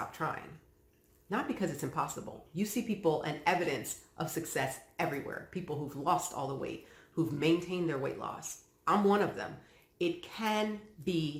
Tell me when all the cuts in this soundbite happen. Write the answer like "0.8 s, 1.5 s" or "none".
none